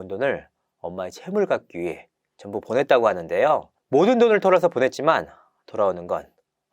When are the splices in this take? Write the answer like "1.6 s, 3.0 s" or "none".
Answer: 3.7 s